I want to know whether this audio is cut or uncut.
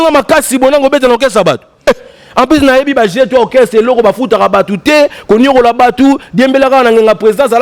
uncut